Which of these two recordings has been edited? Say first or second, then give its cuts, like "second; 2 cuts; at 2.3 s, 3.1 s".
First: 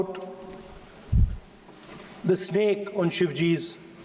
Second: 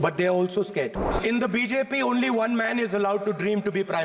second; 1 cut; at 1.1 s